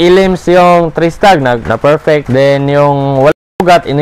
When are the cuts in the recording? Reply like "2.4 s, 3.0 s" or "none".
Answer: 2.1 s